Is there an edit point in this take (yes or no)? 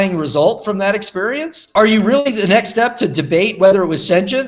yes